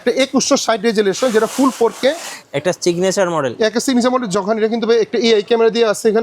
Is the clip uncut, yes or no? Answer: no